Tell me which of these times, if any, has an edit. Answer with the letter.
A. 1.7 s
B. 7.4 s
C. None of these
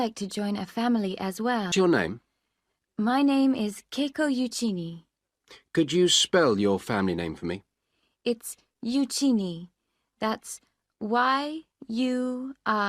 A